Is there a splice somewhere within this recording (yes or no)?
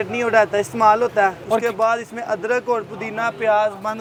no